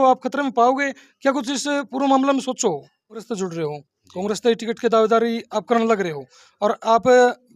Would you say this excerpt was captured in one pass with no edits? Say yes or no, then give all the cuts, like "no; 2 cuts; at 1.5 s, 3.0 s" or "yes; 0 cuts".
no; 1 cut; at 3.2 s